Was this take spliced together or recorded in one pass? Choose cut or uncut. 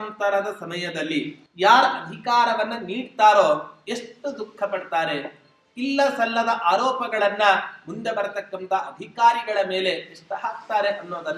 cut